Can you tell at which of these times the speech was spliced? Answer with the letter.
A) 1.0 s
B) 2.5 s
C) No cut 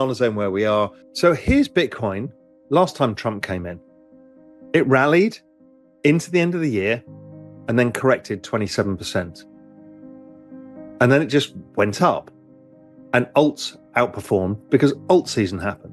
A